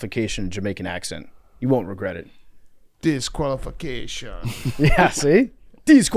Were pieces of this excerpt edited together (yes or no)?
no